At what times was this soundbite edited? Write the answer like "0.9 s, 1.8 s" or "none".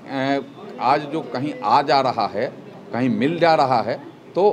none